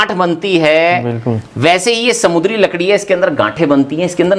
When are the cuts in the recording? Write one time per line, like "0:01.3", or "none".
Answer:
none